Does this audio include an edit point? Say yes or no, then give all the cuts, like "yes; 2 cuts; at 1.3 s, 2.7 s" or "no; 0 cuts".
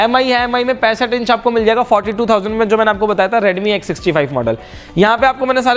no; 0 cuts